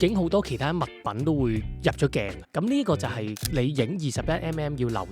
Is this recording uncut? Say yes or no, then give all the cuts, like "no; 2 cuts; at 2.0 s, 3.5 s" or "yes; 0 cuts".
no; 1 cut; at 2.5 s